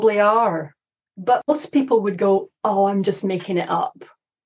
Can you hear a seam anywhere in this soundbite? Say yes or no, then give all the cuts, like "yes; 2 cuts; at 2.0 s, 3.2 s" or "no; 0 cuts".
yes; 1 cut; at 1.3 s